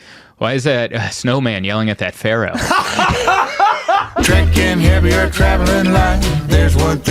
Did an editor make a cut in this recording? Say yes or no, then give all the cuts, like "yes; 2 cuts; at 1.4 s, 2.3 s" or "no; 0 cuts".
yes; 1 cut; at 4.1 s